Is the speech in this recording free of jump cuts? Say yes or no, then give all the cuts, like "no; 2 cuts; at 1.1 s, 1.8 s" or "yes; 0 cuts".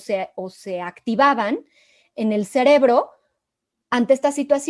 yes; 0 cuts